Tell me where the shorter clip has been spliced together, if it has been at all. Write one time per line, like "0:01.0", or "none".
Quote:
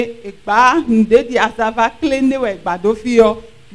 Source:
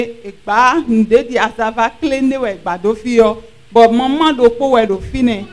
none